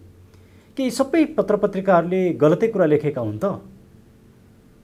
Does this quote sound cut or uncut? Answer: uncut